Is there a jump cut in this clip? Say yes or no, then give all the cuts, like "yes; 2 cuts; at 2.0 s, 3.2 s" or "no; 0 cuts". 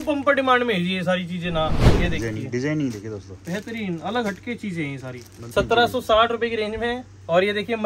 yes; 2 cuts; at 1.8 s, 5.4 s